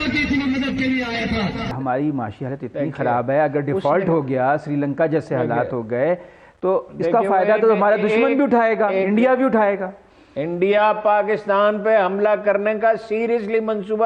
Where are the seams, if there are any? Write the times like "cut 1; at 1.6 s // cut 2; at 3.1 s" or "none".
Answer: cut 1; at 1.7 s